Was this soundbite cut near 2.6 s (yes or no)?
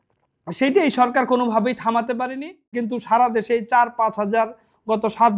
yes